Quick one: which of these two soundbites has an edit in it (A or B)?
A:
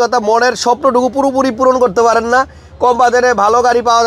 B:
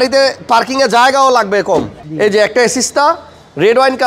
B